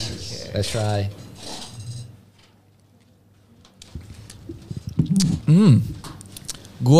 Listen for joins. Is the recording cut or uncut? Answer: uncut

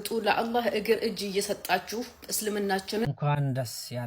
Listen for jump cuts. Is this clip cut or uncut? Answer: cut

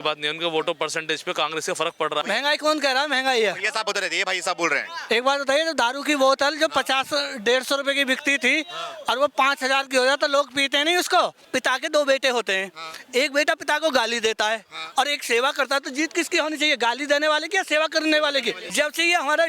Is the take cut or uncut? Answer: cut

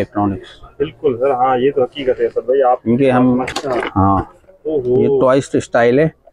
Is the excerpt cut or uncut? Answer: cut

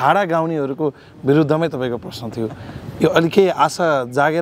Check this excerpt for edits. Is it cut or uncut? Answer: uncut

